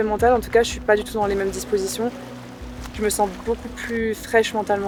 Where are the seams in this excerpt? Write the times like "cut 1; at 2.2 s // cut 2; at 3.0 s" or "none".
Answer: none